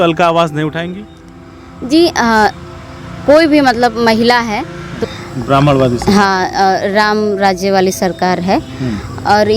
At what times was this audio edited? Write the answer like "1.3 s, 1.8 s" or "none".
4.9 s